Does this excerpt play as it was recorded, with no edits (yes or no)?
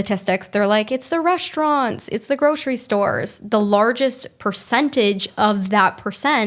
yes